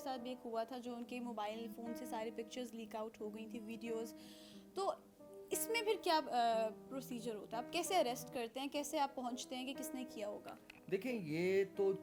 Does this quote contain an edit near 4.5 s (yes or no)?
no